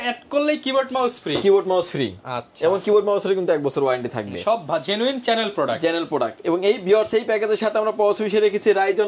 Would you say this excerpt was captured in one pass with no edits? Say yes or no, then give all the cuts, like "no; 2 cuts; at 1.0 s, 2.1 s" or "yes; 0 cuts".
yes; 0 cuts